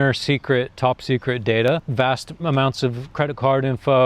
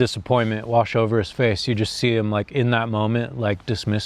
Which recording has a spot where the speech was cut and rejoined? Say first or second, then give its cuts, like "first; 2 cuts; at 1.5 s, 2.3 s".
first; 2 cuts; at 1.9 s, 3.0 s